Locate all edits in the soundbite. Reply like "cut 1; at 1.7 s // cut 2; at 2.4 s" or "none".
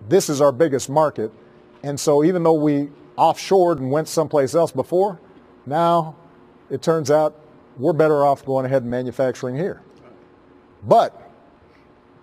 cut 1; at 5.8 s